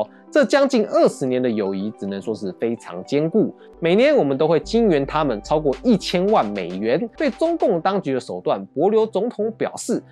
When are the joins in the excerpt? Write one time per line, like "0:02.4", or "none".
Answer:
0:03.7
0:07.1